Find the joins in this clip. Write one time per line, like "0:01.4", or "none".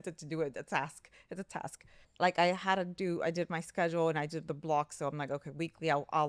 0:02.1